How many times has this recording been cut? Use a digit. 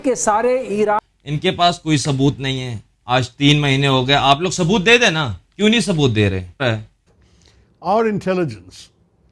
2